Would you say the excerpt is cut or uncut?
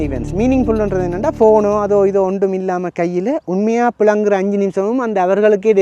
uncut